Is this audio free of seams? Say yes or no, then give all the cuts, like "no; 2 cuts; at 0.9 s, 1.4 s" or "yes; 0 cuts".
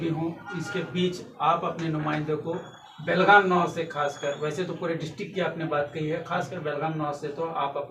yes; 0 cuts